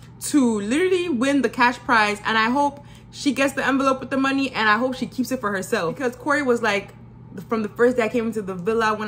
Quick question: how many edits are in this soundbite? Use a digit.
1